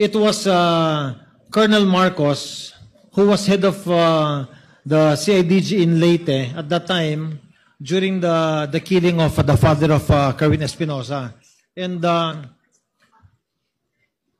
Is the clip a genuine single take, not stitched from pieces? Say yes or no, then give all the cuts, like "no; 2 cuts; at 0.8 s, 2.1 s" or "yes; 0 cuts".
yes; 0 cuts